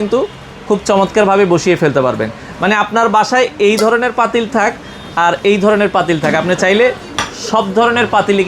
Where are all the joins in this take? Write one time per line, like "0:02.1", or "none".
none

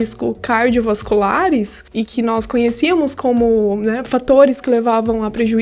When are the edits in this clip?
0:01.8

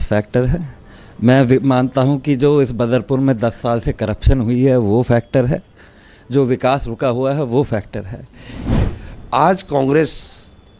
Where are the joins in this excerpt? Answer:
0:08.8

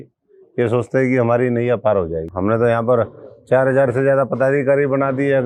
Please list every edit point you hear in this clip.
0:02.2

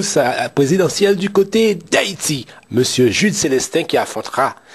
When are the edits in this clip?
0:02.5

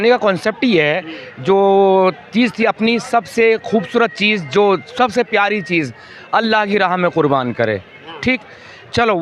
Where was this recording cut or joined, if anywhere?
none

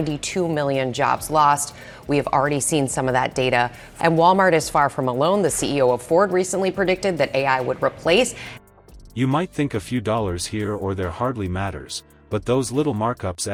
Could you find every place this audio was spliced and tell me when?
none

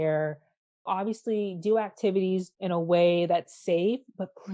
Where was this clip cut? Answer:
0:00.8
0:02.5

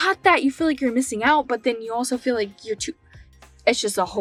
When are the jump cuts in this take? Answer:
none

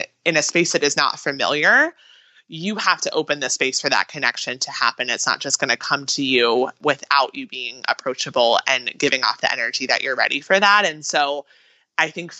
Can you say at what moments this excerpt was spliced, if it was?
0:06.7

